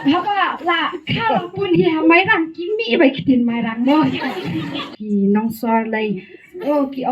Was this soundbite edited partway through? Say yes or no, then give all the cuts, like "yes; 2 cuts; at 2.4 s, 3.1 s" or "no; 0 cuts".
yes; 1 cut; at 4.9 s